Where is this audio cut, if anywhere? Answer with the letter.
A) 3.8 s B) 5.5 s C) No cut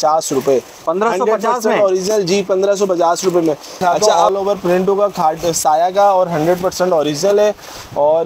A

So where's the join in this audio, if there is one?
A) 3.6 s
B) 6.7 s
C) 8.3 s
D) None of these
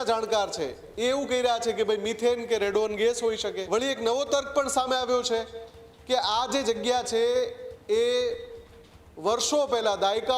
A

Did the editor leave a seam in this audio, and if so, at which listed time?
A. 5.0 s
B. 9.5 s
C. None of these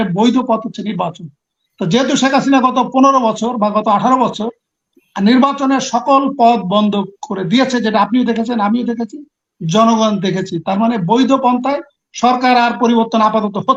C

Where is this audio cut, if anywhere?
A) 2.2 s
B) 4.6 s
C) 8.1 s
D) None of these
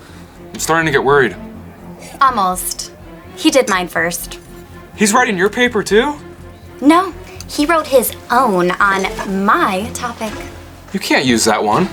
D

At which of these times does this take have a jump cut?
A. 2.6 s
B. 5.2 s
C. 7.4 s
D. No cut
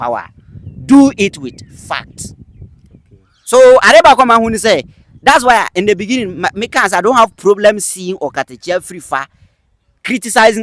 D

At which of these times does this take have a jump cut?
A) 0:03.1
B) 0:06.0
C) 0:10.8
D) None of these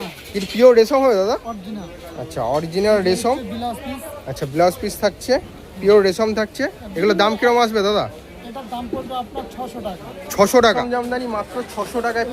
C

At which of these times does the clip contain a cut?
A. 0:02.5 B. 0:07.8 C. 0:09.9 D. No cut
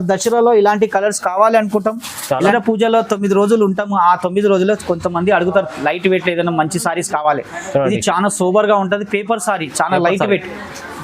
A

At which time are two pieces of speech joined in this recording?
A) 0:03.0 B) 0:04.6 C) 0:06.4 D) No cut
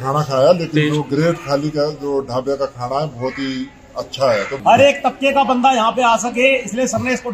B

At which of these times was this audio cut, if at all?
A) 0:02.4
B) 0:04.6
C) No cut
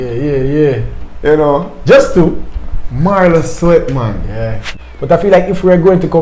B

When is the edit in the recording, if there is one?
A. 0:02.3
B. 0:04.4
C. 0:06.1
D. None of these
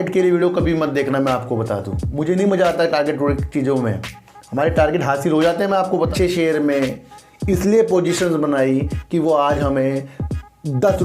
C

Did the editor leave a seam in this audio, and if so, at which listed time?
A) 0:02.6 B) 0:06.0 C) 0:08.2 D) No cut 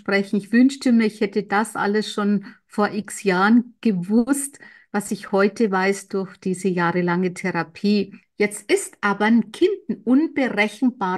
C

